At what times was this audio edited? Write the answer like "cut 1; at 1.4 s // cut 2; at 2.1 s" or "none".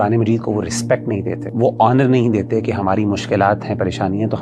cut 1; at 1.4 s